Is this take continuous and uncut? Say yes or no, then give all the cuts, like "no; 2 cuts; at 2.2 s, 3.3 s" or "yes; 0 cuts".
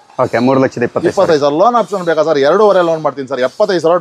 yes; 0 cuts